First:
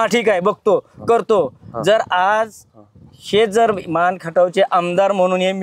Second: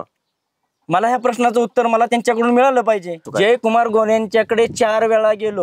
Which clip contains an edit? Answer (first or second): second